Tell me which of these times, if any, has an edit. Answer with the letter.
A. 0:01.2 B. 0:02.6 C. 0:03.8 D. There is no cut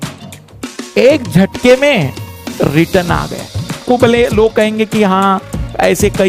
C